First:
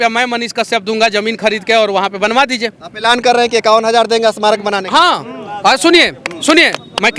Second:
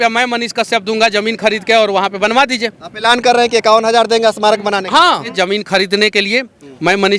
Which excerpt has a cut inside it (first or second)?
second